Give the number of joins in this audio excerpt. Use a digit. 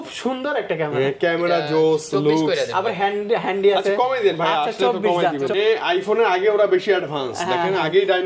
1